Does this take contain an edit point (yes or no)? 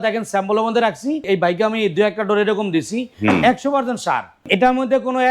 yes